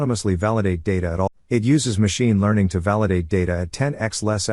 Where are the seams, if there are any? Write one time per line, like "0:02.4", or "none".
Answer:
0:01.3